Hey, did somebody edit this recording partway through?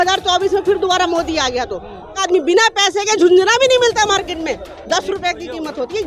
yes; 1 cut; at 2.2 s

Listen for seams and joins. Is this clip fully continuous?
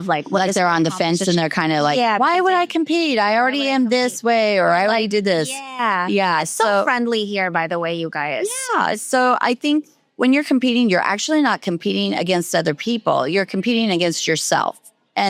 yes; 0 cuts

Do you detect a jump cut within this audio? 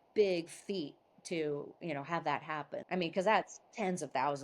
yes; 1 cut; at 2.8 s

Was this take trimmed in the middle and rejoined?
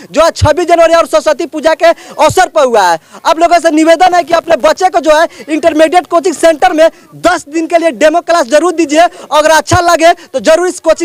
no; 0 cuts

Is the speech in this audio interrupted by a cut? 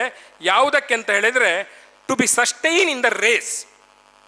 no; 0 cuts

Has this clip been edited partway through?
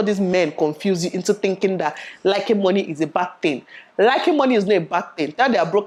no; 0 cuts

